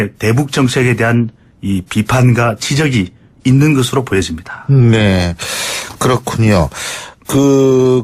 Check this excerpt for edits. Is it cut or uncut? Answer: cut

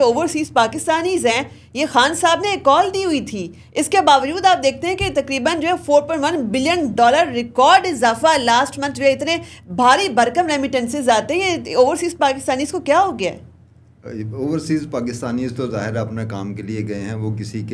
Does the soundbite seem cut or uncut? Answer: uncut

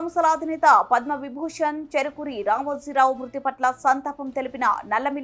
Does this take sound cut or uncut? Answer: uncut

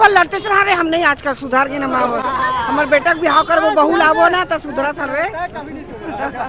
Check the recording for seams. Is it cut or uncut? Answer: uncut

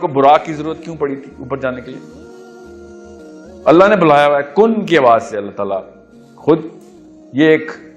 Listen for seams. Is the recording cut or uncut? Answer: cut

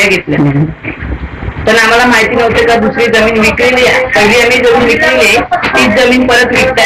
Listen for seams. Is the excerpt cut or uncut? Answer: uncut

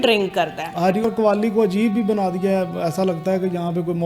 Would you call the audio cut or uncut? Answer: cut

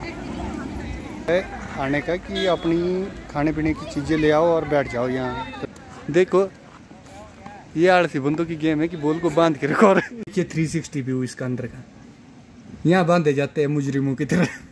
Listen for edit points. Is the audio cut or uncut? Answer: cut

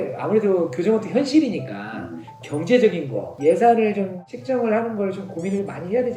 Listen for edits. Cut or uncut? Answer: uncut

